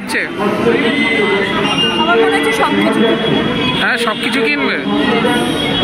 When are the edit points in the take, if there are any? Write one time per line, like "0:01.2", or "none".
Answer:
0:04.2